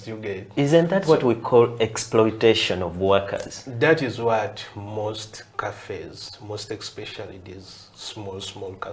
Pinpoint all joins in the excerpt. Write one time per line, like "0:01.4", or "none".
none